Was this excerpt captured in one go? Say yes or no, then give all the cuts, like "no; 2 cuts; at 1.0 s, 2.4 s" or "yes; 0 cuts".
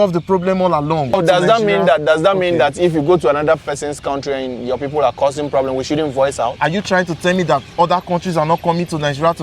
no; 1 cut; at 1.1 s